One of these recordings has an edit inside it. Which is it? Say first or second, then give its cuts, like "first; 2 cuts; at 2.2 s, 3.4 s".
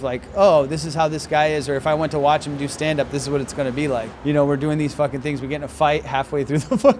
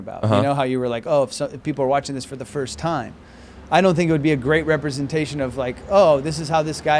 first; 1 cut; at 4.1 s